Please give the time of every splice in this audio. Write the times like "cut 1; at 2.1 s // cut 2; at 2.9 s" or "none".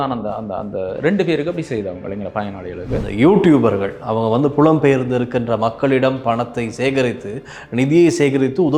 cut 1; at 3.0 s